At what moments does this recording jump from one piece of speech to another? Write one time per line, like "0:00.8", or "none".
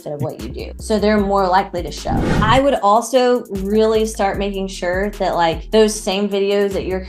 0:02.3